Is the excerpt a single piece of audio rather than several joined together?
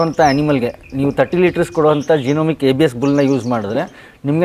yes; 0 cuts

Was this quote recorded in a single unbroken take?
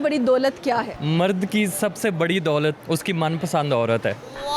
no; 2 cuts; at 0.9 s, 2.8 s

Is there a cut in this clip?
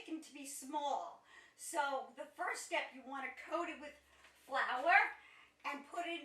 no; 0 cuts

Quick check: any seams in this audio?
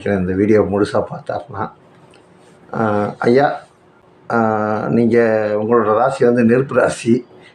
no; 0 cuts

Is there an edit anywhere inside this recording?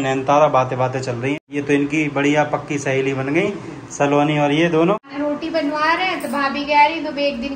yes; 2 cuts; at 1.3 s, 5.1 s

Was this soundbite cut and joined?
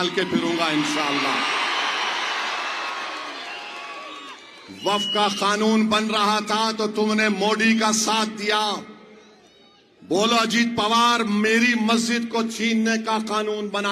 no; 0 cuts

